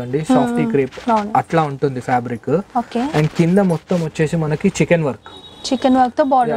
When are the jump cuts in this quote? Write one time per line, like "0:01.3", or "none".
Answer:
none